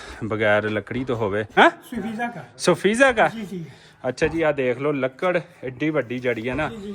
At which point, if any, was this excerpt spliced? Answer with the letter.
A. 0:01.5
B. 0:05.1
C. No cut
A